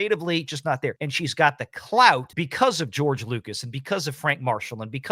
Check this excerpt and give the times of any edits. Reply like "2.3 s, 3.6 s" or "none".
1.1 s, 2.4 s